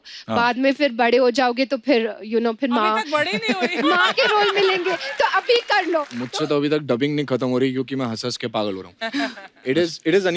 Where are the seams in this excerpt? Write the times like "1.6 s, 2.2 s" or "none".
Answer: 6.2 s